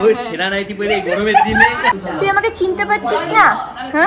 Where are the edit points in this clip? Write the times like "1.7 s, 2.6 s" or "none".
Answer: 1.9 s